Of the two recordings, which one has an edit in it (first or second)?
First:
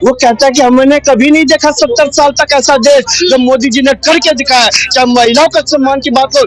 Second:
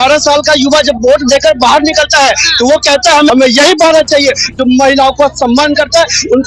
second